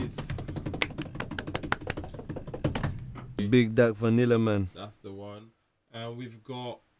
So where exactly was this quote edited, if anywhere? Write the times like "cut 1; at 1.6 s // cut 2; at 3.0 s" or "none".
cut 1; at 3.4 s

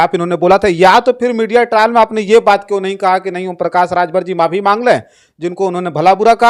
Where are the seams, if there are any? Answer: none

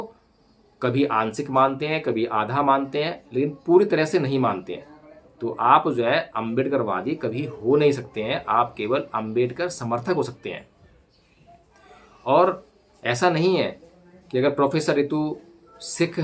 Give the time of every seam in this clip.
none

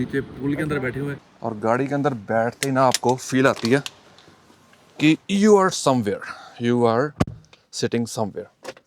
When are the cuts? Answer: cut 1; at 1.2 s

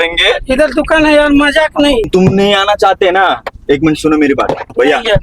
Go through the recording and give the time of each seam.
cut 1; at 2.1 s

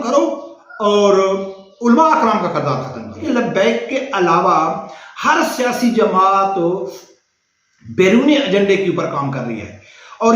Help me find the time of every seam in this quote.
cut 1; at 3.3 s

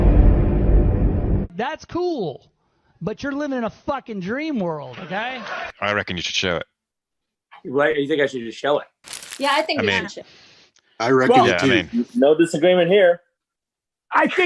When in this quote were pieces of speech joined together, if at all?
cut 1; at 1.4 s

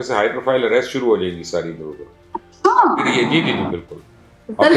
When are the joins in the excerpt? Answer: none

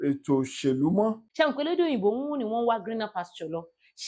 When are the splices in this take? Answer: cut 1; at 1.2 s

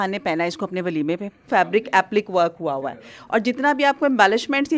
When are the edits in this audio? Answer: cut 1; at 1.4 s

